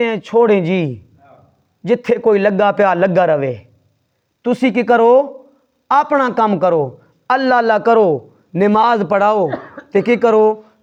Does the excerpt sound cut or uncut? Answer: uncut